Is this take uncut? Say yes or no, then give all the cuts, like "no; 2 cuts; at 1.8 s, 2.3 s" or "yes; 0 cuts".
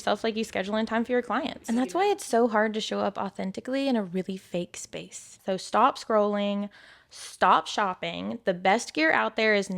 no; 2 cuts; at 1.6 s, 5.4 s